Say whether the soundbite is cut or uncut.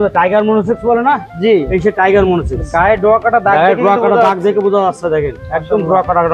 uncut